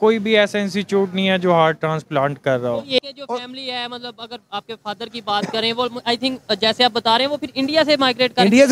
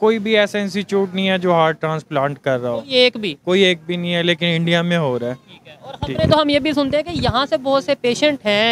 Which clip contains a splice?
first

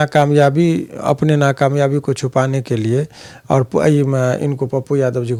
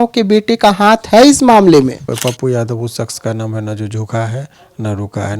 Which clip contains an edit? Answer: second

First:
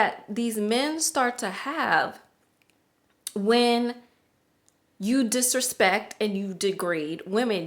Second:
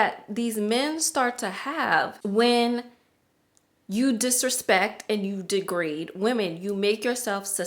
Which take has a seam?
second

